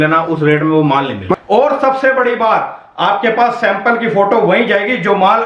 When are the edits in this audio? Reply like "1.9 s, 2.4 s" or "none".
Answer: 1.4 s